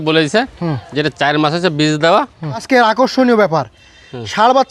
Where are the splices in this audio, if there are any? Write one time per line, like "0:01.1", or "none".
0:02.6